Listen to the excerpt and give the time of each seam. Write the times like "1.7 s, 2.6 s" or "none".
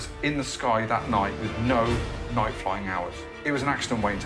1.4 s, 3.2 s